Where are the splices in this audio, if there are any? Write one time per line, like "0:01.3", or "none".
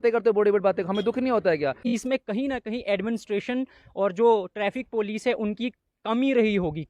0:01.9